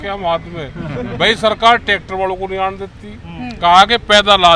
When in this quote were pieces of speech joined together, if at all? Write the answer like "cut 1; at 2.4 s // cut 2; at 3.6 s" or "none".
none